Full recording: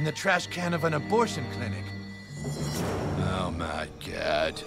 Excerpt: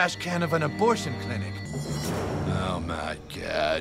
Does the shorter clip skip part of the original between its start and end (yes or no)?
yes